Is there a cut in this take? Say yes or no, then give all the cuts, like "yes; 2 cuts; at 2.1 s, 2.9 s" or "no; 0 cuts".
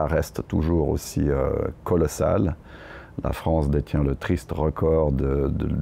no; 0 cuts